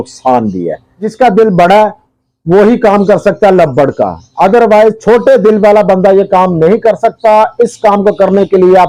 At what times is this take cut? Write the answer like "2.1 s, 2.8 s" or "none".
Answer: 1.1 s